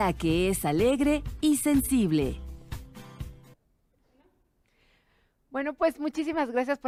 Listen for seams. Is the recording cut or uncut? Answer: uncut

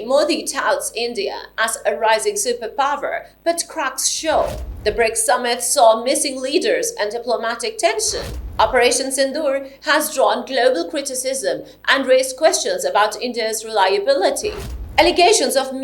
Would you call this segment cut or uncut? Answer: uncut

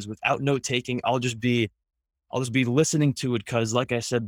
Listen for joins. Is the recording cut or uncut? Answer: uncut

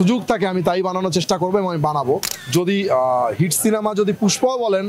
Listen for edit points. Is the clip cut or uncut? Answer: cut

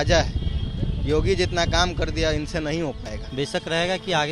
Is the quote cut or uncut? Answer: cut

